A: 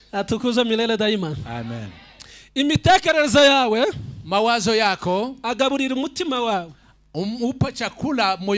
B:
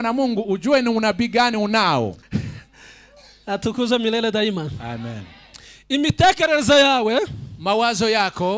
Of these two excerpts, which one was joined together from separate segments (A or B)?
B